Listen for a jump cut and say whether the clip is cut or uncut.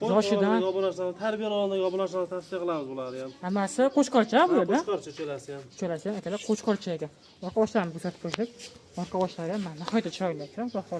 uncut